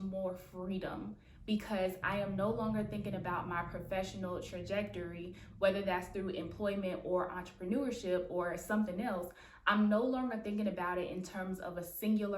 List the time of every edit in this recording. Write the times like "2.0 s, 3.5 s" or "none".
2.0 s